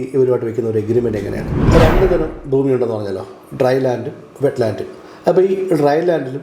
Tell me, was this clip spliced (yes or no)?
yes